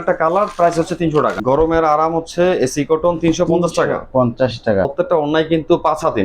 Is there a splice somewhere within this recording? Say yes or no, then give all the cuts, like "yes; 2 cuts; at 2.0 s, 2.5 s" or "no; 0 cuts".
yes; 2 cuts; at 1.4 s, 4.9 s